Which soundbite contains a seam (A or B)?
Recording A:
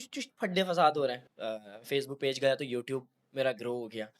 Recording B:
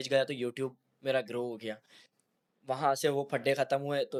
A